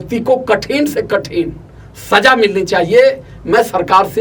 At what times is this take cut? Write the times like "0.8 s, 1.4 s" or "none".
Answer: none